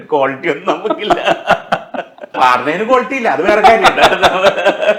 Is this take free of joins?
no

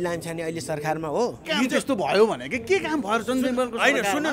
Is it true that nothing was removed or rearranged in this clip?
no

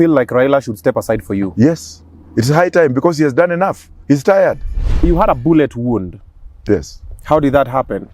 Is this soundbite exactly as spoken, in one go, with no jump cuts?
no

